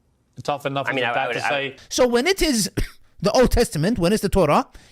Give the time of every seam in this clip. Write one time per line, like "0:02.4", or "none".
0:01.8